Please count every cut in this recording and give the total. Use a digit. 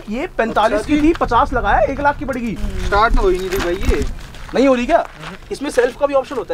1